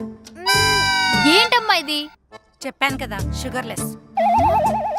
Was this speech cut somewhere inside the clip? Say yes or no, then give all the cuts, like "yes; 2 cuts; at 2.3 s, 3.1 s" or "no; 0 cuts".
no; 0 cuts